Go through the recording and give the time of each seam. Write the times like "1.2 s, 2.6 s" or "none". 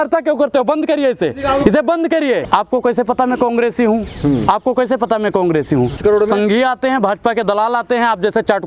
2.4 s, 6.0 s